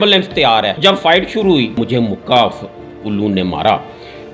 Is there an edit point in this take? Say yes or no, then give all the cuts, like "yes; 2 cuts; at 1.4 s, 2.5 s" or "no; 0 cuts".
yes; 2 cuts; at 0.8 s, 1.8 s